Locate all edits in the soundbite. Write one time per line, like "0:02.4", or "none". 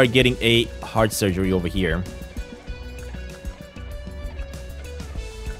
none